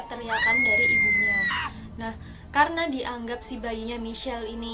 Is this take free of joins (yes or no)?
yes